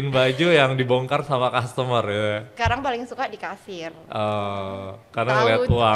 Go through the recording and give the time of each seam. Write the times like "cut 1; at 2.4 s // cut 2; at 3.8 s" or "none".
cut 1; at 2.5 s